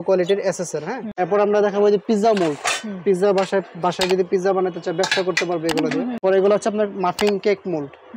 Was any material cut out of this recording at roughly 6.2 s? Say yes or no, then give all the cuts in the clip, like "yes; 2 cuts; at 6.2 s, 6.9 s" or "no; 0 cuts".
yes; 2 cuts; at 1.0 s, 6.2 s